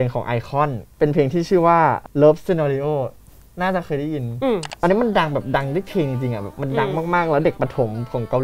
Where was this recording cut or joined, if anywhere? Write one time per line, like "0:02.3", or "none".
0:00.9
0:04.7